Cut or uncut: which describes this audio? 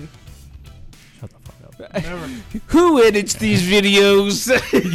uncut